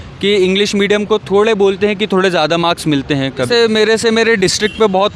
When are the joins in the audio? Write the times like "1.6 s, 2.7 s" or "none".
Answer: 3.5 s